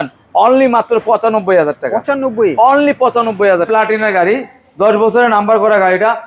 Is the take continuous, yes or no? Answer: no